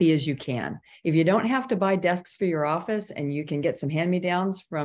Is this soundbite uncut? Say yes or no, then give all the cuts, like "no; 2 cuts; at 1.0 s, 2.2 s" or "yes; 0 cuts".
yes; 0 cuts